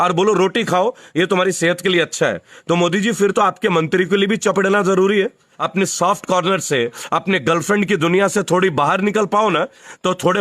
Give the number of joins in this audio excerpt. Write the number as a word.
one